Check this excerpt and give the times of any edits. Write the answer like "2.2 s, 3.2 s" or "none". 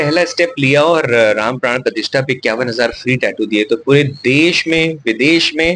none